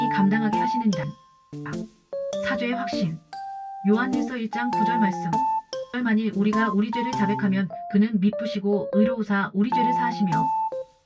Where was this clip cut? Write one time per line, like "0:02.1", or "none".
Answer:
none